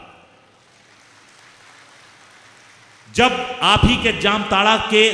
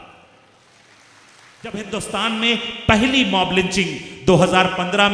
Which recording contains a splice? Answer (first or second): second